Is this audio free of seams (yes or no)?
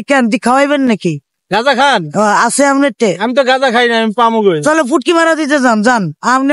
yes